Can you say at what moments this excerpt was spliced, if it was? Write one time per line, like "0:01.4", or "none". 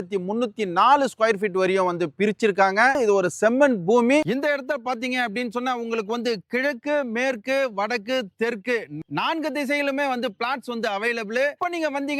none